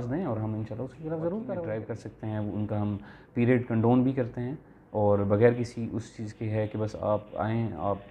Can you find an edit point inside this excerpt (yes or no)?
yes